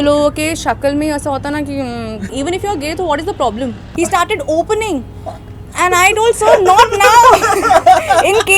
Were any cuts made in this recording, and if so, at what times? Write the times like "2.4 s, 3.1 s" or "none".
2.3 s, 3.8 s